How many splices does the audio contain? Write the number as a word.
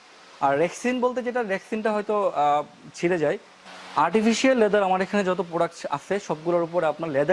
one